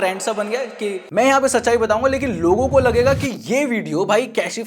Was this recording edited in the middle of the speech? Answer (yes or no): yes